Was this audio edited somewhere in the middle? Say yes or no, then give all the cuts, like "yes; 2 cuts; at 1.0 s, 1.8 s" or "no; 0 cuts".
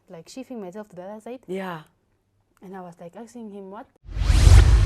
yes; 1 cut; at 3.9 s